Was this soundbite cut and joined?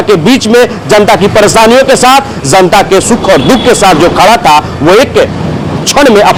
no; 0 cuts

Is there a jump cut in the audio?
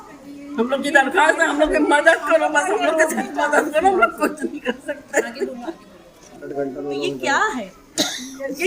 yes; 1 cut; at 6.4 s

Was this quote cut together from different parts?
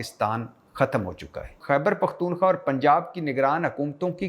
yes; 1 cut; at 1.6 s

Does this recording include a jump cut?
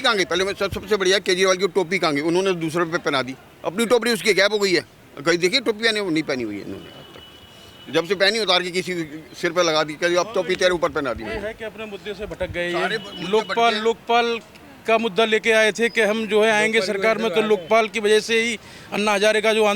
no; 0 cuts

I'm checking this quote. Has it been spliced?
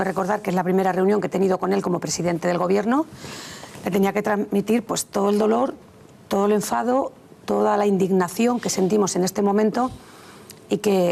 no; 0 cuts

